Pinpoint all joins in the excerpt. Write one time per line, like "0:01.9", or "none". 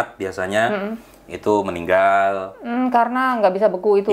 none